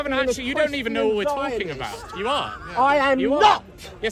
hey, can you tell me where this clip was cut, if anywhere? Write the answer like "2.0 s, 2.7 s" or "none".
none